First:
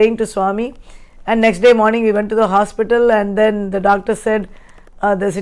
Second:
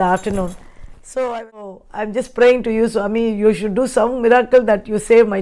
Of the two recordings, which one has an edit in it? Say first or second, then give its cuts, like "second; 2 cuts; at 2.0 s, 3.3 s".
second; 1 cut; at 1.9 s